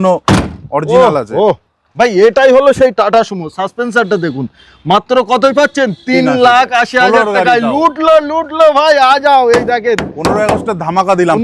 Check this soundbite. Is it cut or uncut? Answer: uncut